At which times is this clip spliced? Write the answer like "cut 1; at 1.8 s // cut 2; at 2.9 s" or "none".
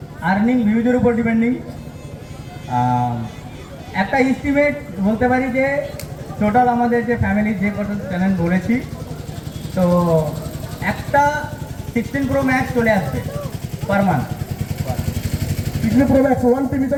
none